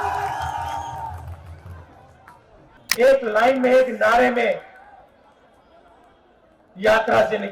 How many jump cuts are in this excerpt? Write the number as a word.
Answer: one